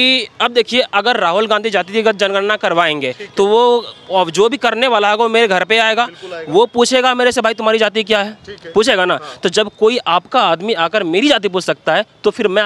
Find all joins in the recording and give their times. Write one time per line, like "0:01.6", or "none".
none

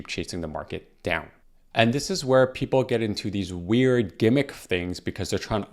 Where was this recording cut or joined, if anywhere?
0:01.3

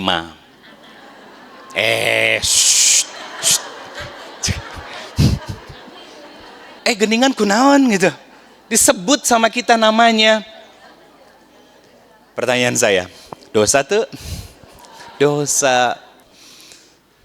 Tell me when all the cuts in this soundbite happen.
0:06.7
0:16.2

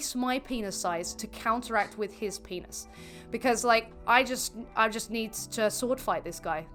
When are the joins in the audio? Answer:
none

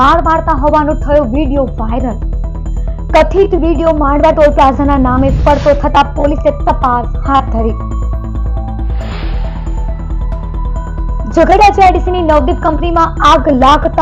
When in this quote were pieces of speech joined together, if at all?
none

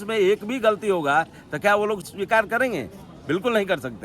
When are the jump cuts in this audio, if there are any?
0:02.1

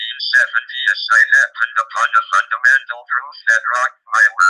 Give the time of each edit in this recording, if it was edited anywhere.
0:01.3
0:03.5

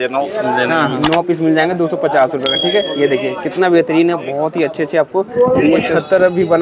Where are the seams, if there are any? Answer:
0:00.9
0:05.9

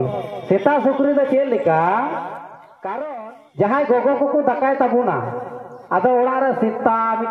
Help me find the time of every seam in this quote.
0:03.0

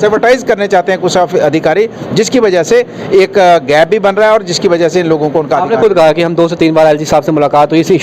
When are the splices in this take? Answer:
none

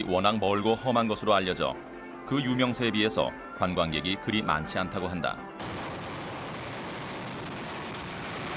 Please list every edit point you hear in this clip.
0:04.5

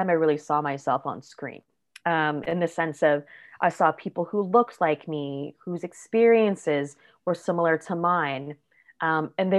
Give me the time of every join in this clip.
none

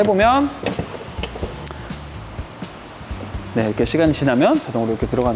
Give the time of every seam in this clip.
none

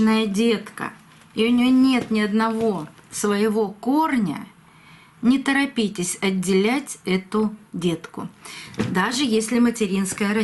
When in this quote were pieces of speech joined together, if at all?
none

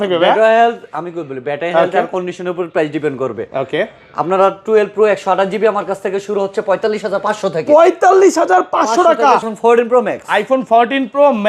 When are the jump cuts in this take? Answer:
0:09.5

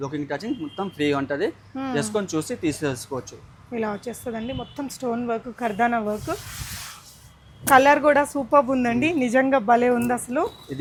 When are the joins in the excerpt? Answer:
none

